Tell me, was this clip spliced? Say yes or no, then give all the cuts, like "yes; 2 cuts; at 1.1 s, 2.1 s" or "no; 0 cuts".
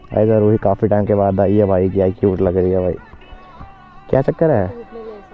no; 0 cuts